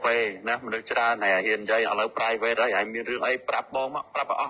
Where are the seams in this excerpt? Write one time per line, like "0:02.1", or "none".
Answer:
none